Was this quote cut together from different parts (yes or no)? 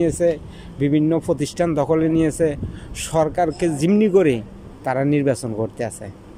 no